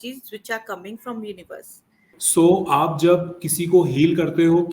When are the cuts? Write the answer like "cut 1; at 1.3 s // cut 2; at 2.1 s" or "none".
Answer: cut 1; at 2.1 s